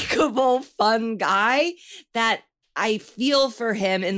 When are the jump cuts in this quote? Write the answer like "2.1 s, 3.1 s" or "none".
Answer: none